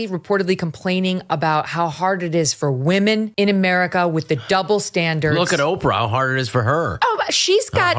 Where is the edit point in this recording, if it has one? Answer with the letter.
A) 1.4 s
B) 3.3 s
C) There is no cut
B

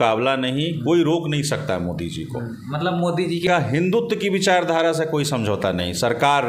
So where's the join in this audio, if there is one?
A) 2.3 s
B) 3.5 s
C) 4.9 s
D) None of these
B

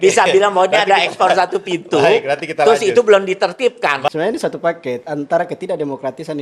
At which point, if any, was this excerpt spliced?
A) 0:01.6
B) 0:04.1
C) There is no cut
B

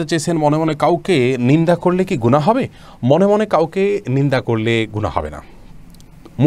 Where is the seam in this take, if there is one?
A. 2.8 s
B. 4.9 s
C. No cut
C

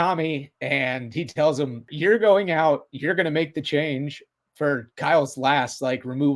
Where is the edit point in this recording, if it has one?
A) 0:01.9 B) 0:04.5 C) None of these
A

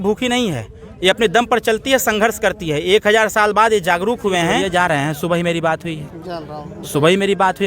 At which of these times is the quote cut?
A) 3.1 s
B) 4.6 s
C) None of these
B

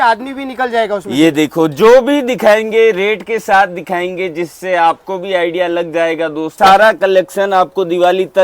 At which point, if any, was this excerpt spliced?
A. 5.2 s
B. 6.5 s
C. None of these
B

